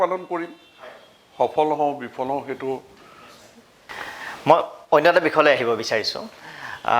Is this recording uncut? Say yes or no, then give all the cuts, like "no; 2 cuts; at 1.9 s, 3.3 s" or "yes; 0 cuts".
yes; 0 cuts